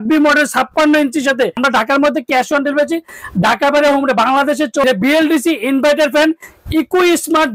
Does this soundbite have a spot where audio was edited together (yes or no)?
yes